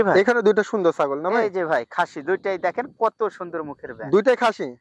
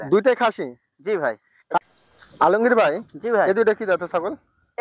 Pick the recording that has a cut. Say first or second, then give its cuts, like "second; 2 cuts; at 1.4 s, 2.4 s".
second; 1 cut; at 1.8 s